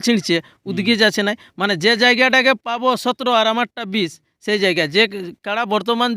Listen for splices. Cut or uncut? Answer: uncut